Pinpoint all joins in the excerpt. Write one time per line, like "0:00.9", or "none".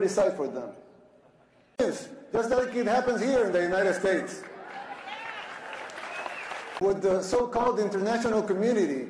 none

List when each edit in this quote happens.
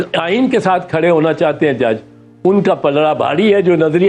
none

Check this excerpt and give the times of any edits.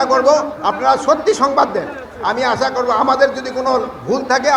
none

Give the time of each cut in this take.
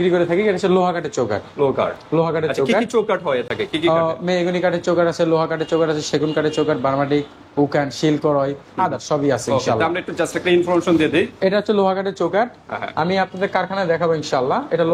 none

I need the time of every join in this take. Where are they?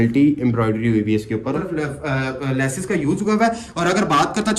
0:01.6

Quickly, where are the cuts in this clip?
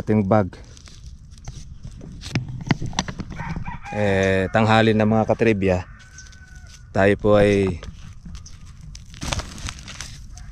0:09.2

